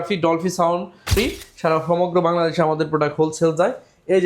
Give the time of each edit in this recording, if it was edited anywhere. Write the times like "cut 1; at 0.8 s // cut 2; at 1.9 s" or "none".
cut 1; at 1.2 s